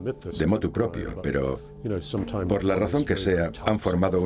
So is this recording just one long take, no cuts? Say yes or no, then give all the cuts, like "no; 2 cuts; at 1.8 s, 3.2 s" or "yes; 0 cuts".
yes; 0 cuts